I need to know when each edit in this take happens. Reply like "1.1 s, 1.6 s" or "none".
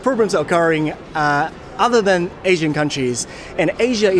none